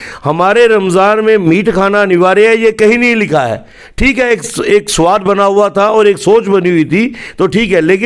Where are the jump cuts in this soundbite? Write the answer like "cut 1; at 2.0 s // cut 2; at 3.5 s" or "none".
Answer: none